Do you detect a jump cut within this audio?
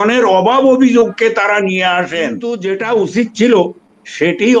yes; 1 cut; at 2.5 s

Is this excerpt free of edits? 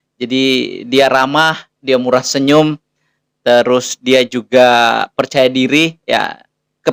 yes; 0 cuts

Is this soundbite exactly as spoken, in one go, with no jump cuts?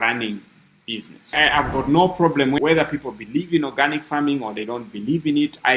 no; 2 cuts; at 1.3 s, 2.6 s

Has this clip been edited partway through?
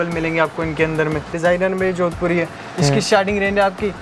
yes; 1 cut; at 1.3 s

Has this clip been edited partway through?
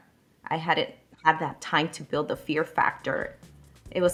no; 0 cuts

